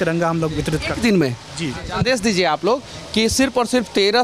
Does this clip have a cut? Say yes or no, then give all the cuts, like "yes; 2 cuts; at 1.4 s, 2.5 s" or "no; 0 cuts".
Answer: yes; 1 cut; at 1.9 s